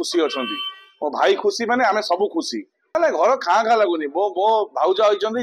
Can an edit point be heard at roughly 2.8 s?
yes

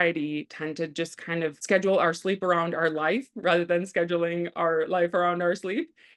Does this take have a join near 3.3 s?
no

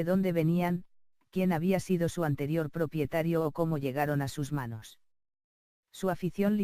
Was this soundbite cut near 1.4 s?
no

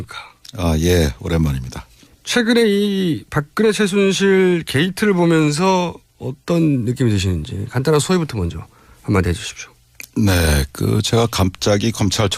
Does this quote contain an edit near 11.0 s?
no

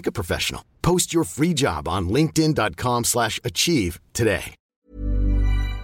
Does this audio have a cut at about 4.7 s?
yes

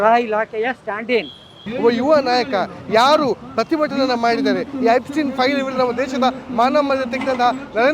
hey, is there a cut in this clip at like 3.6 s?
no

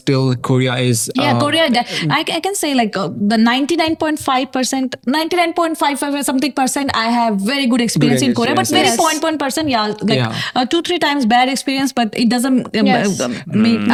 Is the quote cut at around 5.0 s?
no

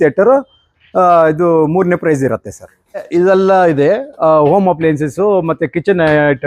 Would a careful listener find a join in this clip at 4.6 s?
no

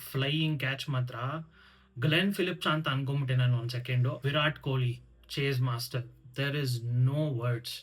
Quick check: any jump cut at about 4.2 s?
yes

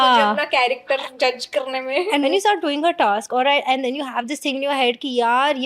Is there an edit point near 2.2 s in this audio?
yes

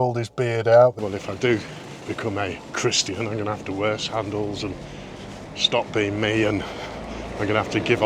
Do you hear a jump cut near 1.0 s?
yes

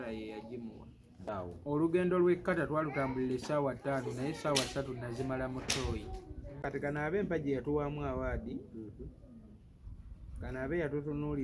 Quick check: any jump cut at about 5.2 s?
no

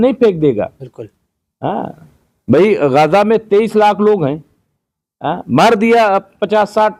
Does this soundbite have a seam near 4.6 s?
no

